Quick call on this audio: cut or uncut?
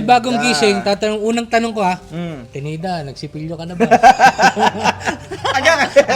uncut